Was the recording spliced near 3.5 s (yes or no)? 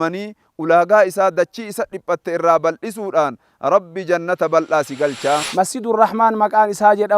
no